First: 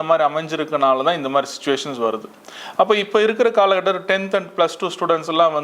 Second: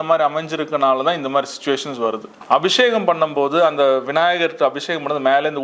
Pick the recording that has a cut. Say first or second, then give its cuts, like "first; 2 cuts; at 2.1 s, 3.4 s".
second; 1 cut; at 2.3 s